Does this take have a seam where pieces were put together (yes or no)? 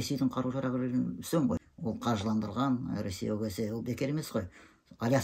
yes